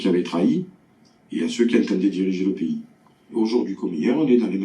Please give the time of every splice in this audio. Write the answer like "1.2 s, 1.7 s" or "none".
3.3 s

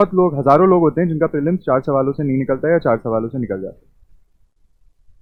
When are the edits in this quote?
none

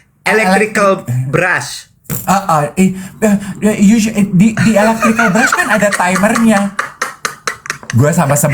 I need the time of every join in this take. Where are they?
none

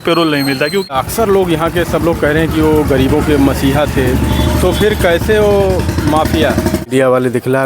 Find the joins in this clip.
0.9 s, 6.9 s

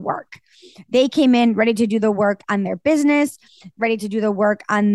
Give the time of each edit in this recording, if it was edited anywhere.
none

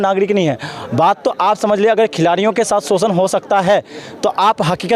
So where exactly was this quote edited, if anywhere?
none

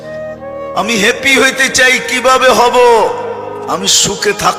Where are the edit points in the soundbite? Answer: none

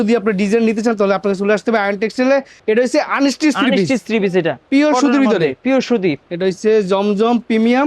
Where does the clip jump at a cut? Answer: 2.5 s, 6.2 s

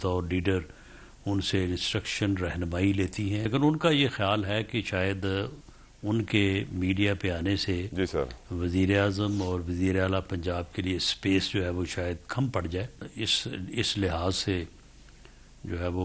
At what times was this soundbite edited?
3.5 s, 13.0 s

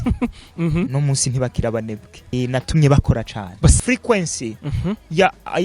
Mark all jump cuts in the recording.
2.3 s, 3.8 s

